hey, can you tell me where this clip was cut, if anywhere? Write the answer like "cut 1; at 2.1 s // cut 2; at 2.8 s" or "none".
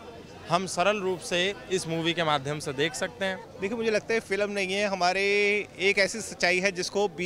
cut 1; at 3.5 s

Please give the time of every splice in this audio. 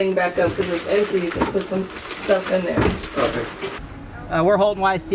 cut 1; at 3.7 s

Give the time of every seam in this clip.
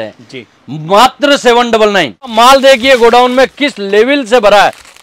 cut 1; at 2.3 s

